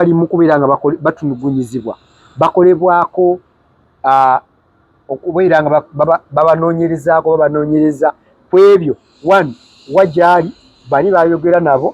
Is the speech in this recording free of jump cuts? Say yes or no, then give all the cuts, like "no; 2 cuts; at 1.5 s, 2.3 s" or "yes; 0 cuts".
yes; 0 cuts